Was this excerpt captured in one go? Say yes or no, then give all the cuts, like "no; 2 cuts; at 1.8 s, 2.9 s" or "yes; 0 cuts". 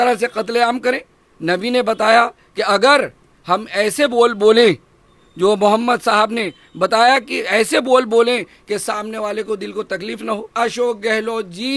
no; 1 cut; at 10.5 s